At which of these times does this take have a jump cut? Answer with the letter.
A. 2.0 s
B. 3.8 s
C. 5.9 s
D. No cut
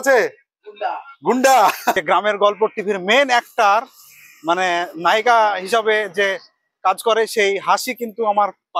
A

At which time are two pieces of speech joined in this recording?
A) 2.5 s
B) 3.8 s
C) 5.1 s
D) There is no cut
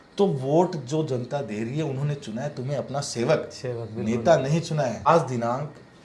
C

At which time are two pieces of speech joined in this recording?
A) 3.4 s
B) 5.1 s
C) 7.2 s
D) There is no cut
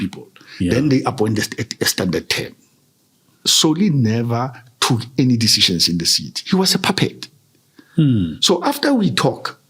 A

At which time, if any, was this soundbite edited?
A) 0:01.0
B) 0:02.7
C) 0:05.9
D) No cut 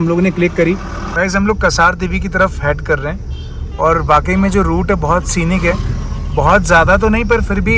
A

